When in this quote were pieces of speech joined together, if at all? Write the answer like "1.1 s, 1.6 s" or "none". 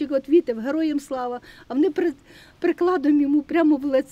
none